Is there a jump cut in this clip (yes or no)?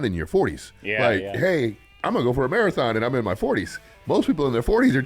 yes